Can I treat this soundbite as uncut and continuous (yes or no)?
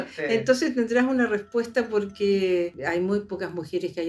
no